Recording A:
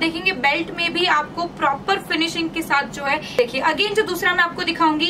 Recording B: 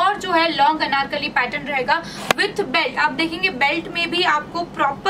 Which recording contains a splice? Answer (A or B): A